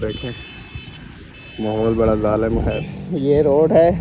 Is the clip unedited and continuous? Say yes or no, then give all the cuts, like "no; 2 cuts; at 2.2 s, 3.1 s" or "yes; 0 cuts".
no; 1 cut; at 2.8 s